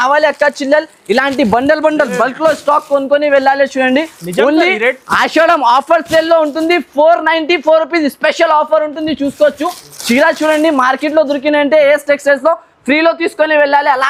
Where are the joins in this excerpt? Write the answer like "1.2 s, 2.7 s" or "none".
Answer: none